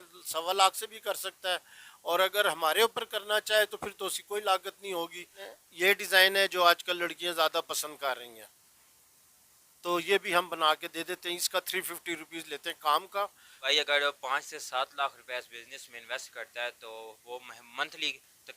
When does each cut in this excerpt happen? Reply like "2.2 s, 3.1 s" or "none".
5.4 s, 13.7 s